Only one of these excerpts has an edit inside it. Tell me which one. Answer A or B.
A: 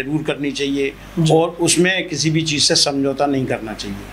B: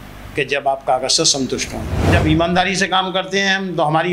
B